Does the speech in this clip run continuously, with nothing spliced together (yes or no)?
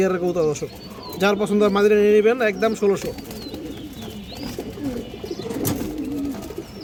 yes